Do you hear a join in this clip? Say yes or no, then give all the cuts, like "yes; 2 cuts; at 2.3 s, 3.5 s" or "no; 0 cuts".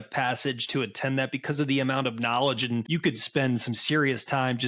yes; 1 cut; at 2.9 s